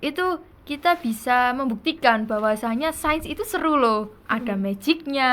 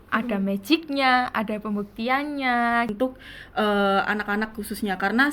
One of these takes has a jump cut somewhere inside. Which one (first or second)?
second